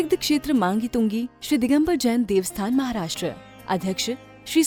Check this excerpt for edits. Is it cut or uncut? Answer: uncut